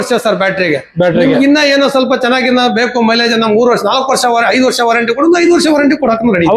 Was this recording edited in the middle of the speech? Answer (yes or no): no